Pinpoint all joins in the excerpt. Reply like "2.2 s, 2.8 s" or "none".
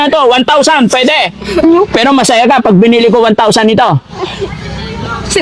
1.6 s